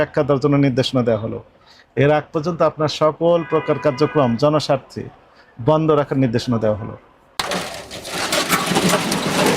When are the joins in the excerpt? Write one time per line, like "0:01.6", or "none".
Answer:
0:07.2